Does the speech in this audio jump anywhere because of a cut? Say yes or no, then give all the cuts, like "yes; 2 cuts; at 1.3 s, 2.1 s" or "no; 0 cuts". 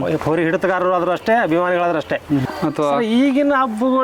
yes; 1 cut; at 2.4 s